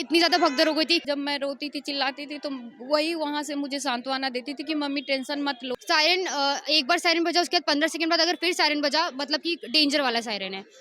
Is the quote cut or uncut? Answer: cut